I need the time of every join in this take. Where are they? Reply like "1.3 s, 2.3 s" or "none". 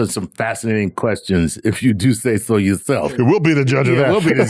3.2 s